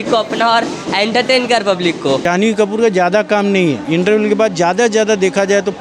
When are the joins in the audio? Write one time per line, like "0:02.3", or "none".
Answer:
0:02.2
0:03.8

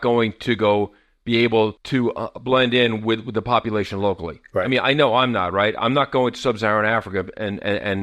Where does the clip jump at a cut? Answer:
0:01.8

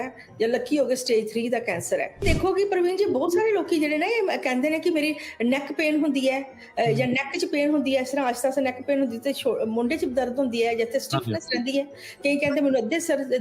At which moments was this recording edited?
0:02.2

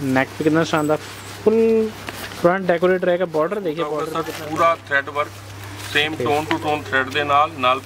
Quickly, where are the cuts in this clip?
0:04.2

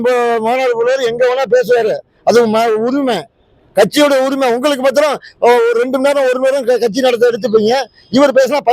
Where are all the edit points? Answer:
none

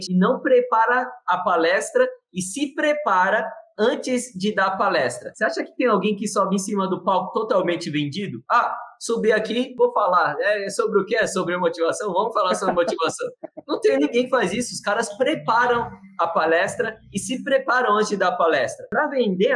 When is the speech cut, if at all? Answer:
none

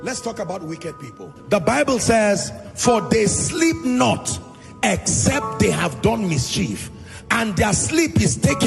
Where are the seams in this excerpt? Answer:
none

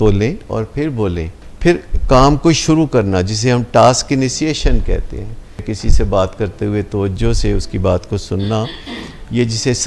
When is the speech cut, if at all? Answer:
0:01.5
0:05.7

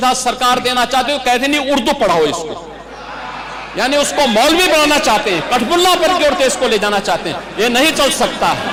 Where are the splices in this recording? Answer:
none

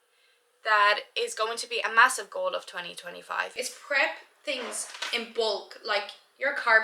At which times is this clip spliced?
0:03.5

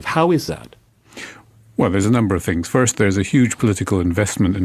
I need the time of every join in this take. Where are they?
0:02.1

